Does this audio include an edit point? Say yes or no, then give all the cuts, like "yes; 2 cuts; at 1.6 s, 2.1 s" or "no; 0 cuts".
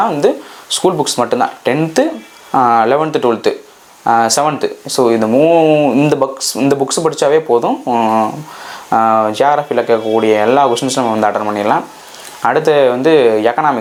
no; 0 cuts